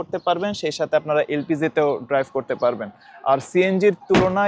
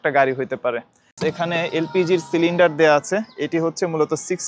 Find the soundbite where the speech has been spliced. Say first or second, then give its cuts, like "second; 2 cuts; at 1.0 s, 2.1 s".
second; 1 cut; at 1.1 s